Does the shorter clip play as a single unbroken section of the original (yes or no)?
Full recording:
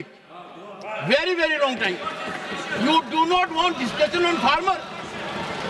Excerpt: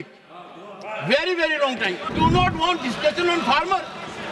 no